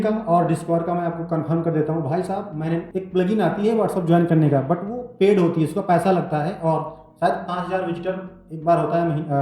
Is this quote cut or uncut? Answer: cut